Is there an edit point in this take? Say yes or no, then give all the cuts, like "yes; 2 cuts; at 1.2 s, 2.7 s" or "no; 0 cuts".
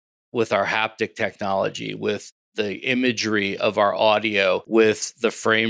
yes; 2 cuts; at 2.4 s, 4.6 s